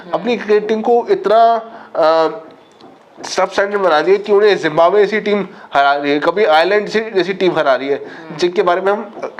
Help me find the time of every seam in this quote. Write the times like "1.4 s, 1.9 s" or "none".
none